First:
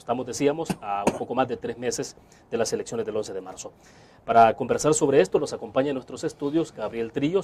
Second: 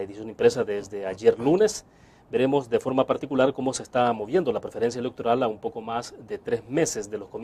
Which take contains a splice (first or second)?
first